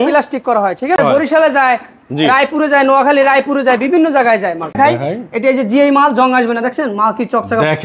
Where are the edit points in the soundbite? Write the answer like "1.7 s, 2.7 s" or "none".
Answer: 1.0 s, 4.8 s